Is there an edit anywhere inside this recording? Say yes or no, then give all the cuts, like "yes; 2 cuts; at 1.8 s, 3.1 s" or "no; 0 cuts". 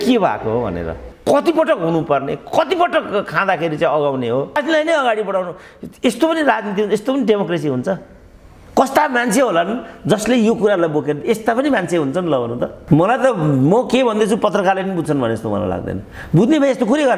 yes; 3 cuts; at 1.1 s, 4.6 s, 12.8 s